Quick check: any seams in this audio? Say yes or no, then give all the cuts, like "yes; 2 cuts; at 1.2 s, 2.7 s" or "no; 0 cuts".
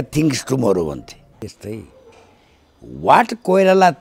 yes; 1 cut; at 1.4 s